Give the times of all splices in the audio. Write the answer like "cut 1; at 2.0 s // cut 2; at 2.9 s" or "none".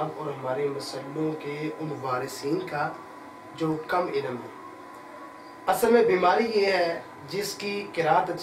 none